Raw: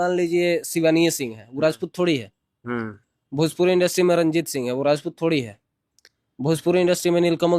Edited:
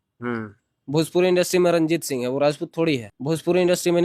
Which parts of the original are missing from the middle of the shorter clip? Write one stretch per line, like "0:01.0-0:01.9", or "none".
0:05.6-0:06.3

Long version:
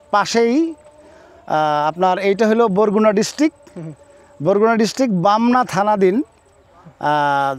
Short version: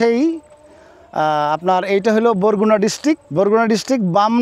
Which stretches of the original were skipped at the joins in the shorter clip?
0:03.6-0:04.3

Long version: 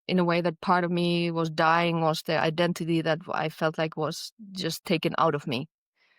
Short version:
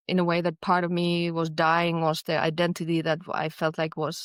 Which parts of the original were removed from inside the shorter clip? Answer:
none

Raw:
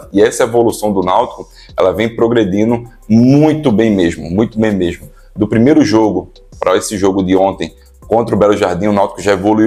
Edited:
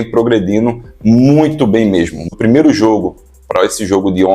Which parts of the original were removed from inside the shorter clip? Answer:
0:04.3-0:05.3

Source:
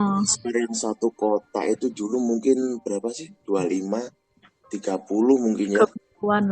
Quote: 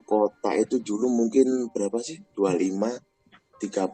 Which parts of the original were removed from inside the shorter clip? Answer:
none

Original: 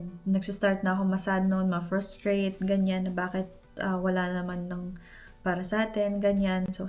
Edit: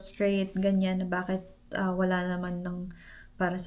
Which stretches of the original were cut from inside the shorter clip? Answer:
none

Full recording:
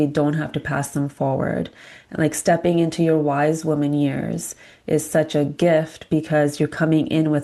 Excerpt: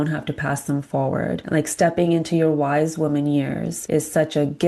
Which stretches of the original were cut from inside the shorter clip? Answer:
0:01.7-0:02.1
0:04.4-0:04.7

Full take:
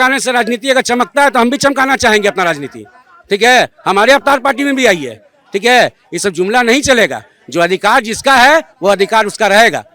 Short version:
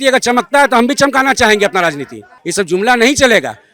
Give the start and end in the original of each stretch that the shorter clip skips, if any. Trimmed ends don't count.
0:03.0-0:06.1

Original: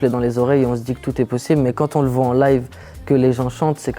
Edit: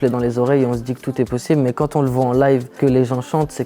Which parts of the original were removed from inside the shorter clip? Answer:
0:02.7-0:03.0

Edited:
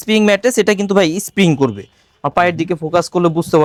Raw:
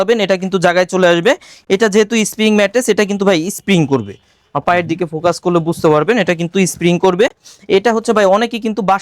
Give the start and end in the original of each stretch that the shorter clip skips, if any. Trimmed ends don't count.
none

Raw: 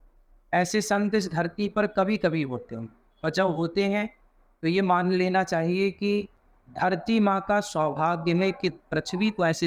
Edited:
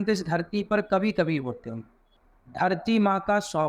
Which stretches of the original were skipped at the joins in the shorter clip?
0:03.1-0:06.3

